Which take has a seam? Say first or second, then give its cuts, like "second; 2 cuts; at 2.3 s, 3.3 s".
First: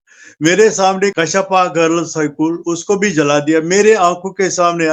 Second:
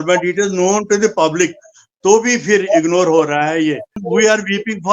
second; 1 cut; at 4.0 s